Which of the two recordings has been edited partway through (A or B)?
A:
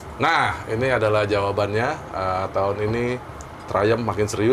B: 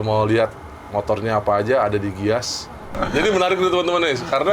B